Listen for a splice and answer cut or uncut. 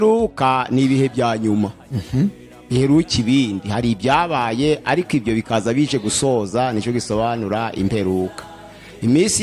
uncut